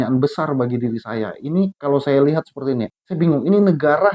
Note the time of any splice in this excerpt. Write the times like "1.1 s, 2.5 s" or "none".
3.0 s